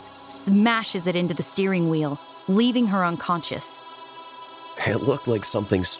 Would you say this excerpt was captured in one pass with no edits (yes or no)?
no